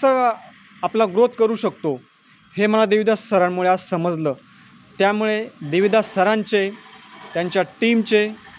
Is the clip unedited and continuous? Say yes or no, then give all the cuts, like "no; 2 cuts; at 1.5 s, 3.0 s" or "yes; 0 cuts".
yes; 0 cuts